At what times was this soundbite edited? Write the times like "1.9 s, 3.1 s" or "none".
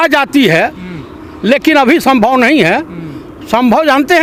none